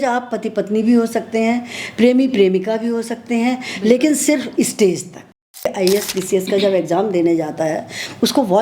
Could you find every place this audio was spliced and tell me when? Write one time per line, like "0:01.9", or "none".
0:05.7